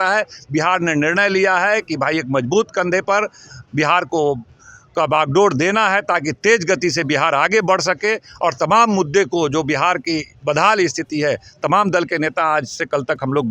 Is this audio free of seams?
yes; 0 cuts

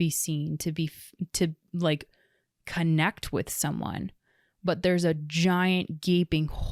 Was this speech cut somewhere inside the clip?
no; 0 cuts

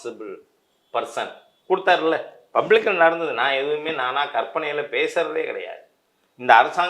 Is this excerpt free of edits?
yes; 0 cuts

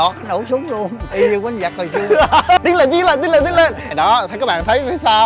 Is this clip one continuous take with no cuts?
no; 3 cuts; at 1.0 s, 2.6 s, 3.8 s

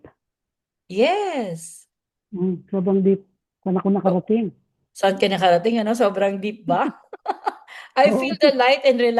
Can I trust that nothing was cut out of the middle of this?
yes; 0 cuts

